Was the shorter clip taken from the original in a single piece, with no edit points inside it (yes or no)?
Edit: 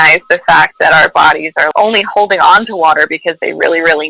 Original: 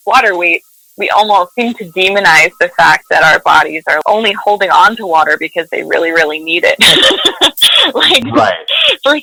yes